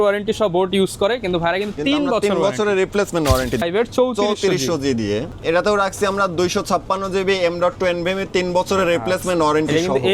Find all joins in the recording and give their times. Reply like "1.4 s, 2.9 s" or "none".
3.6 s, 5.3 s